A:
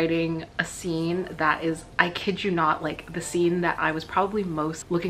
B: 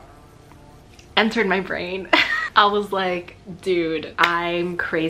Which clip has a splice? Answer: B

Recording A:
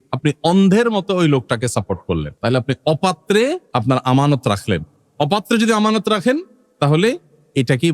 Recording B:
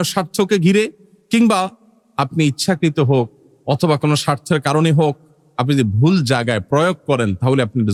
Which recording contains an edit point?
A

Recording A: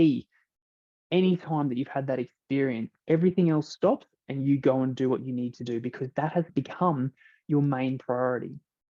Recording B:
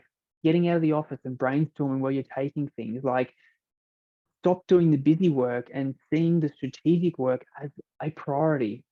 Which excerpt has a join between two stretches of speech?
A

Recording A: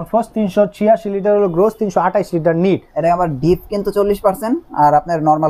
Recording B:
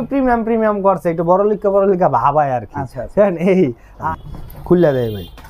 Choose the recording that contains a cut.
B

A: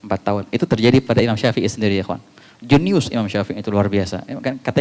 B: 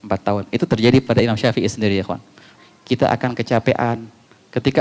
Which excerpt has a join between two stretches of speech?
B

